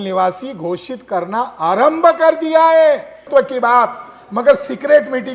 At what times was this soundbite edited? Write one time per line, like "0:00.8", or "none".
0:03.1